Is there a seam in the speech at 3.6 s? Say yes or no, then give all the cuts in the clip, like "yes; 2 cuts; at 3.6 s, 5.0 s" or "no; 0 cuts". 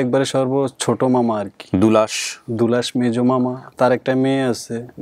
yes; 1 cut; at 3.6 s